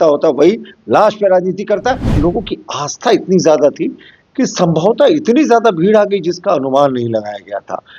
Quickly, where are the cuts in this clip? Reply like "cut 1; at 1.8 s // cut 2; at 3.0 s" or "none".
cut 1; at 2.1 s